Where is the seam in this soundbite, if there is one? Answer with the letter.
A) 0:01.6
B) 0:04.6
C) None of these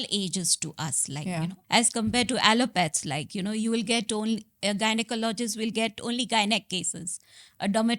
A